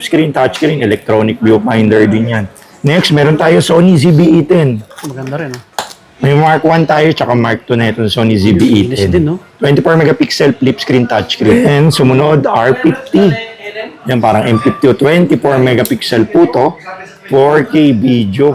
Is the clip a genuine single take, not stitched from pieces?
no; 2 cuts; at 2.8 s, 11.5 s

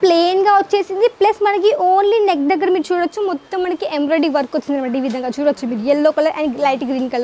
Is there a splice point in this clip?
no; 0 cuts

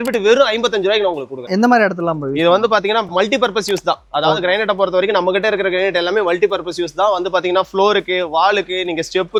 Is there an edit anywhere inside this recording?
no; 0 cuts

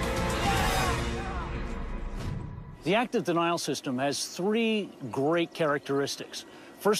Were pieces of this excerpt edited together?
no; 0 cuts

